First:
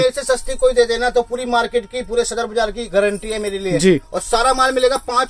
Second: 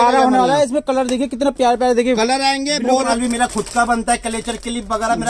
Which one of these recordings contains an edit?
second; 1 cut; at 3.1 s

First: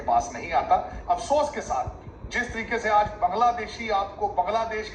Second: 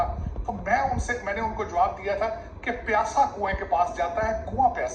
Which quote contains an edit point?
first; 1 cut; at 0.9 s

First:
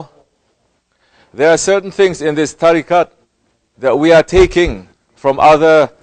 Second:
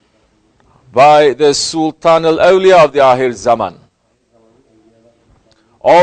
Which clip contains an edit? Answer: second; 1 cut; at 3.8 s

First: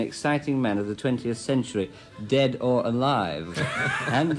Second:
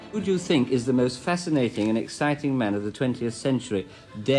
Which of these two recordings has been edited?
first; 1 cut; at 3.5 s

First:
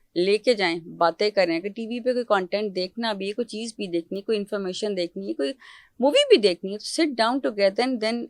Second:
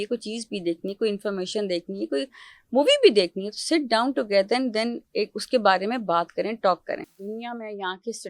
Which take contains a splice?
second; 1 cut; at 7.1 s

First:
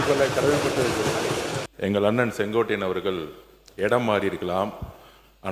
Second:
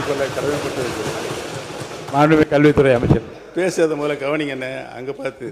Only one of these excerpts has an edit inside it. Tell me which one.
first; 1 cut; at 1.6 s

